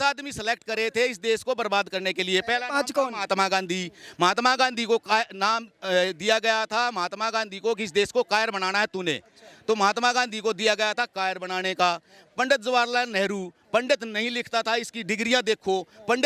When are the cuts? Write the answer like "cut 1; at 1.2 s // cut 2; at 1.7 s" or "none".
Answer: none